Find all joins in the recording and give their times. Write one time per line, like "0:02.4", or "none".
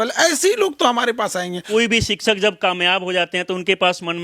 0:01.6